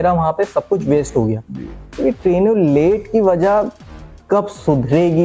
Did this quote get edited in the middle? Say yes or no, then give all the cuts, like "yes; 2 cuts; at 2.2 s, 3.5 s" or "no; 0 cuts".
no; 0 cuts